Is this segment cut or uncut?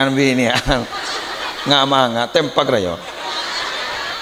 uncut